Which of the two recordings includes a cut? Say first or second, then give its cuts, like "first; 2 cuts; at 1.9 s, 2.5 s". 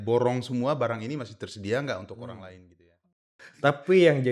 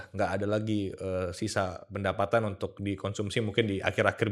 first; 1 cut; at 3.3 s